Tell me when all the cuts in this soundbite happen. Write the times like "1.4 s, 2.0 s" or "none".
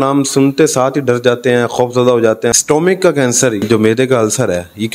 2.5 s, 3.6 s